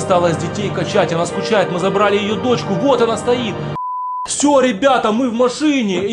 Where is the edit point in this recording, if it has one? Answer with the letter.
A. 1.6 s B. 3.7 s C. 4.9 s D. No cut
B